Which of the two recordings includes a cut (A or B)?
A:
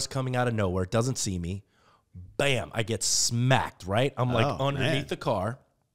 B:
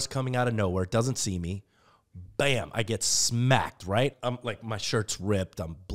B